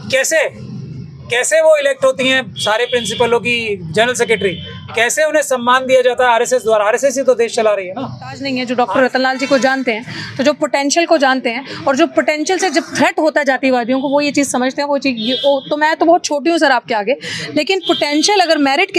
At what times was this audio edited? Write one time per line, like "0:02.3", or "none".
0:08.4